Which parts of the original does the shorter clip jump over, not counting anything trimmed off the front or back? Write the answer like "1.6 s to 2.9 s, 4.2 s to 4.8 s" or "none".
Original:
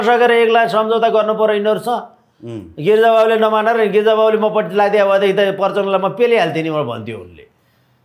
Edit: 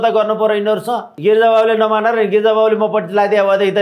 2.1 s to 2.7 s